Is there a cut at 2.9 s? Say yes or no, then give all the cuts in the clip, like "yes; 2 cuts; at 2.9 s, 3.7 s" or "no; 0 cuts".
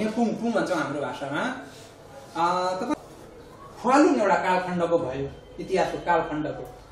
yes; 1 cut; at 2.9 s